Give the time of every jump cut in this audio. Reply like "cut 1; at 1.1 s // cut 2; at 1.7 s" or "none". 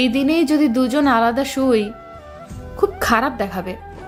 none